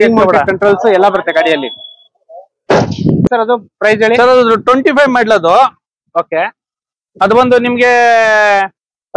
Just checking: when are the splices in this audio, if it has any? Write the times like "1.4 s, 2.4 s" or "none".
3.3 s